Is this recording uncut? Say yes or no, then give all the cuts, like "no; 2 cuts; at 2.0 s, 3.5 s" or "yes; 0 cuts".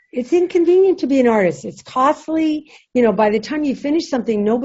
no; 1 cut; at 2.7 s